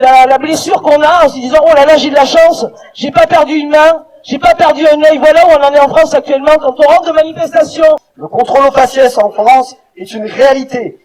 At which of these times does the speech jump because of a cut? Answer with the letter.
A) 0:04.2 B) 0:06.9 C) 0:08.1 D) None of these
C